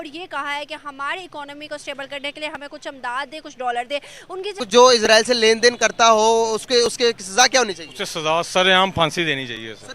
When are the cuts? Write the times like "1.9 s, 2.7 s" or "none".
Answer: 4.5 s

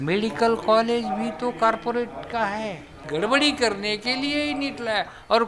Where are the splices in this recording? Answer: 3.0 s

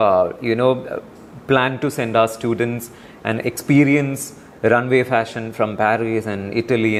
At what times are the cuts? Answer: none

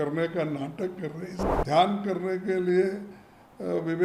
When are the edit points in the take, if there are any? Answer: 1.4 s

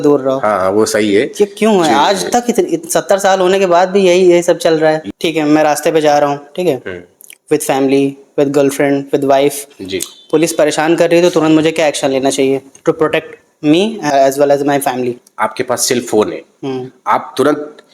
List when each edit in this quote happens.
5.0 s, 14.0 s, 15.2 s

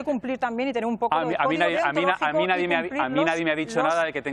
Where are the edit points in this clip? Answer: none

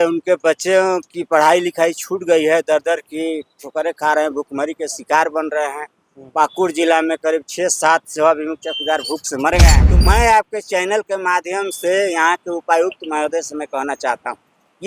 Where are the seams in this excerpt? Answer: 9.9 s

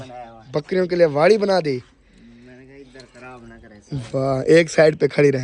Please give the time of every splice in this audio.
none

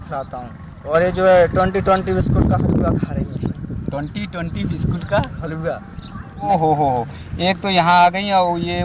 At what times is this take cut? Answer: 0.8 s, 6.5 s

